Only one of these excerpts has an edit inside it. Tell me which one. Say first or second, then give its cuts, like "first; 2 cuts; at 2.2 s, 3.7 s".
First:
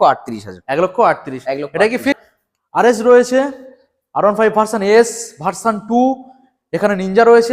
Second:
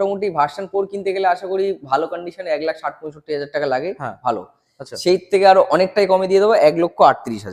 first; 1 cut; at 2.2 s